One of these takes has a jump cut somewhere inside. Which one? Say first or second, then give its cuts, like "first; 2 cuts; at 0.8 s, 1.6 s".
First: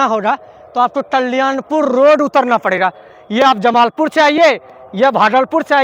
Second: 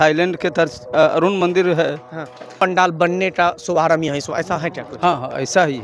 second; 1 cut; at 2.6 s